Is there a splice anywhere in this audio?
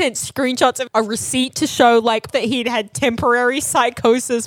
yes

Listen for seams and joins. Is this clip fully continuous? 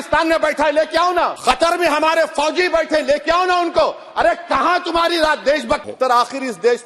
no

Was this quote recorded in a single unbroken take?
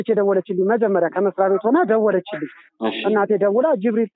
no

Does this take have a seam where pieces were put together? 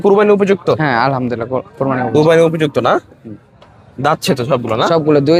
no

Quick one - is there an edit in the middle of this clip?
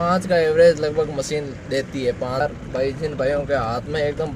yes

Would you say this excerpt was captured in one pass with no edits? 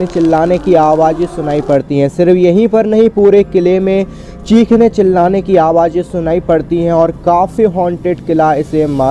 yes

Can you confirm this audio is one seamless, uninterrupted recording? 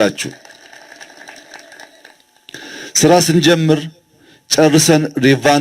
yes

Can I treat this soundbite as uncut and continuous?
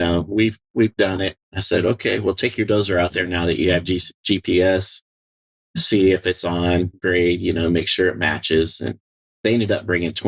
yes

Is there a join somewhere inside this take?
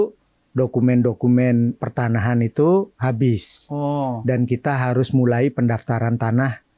no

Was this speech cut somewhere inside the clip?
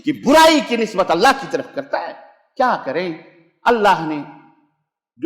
no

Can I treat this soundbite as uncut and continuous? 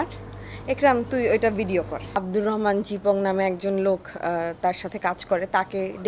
no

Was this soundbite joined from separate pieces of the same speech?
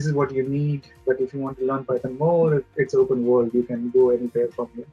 no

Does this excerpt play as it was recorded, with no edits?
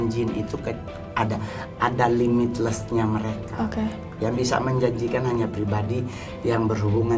yes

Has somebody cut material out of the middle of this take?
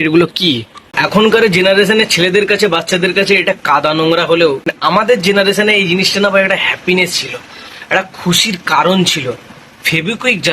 yes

